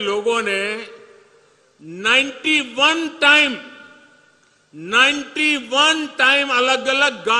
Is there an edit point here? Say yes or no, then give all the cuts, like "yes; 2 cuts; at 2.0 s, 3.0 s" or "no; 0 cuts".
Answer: no; 0 cuts